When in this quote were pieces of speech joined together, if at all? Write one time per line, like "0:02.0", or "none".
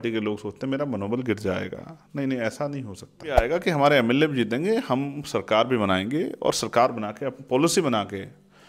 0:03.4